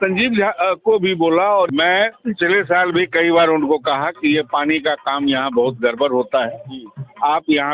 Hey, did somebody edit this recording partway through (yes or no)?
yes